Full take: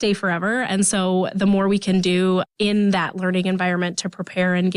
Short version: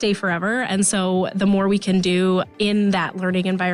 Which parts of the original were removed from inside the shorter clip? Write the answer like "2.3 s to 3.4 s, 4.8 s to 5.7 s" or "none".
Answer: none